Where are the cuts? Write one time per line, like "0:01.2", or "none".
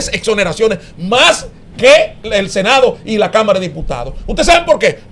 0:02.2